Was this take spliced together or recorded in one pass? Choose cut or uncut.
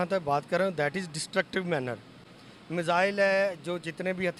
uncut